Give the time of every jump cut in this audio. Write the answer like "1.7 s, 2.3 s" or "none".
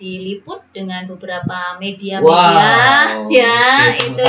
none